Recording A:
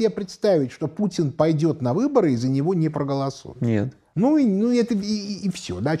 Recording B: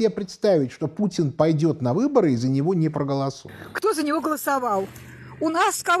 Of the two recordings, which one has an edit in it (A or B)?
B